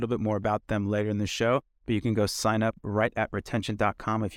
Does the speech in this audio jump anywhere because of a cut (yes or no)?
no